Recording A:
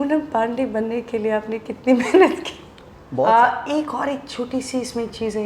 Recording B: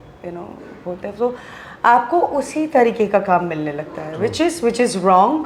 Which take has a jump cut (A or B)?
A